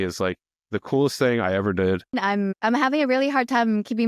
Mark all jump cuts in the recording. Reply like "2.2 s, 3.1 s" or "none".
2.2 s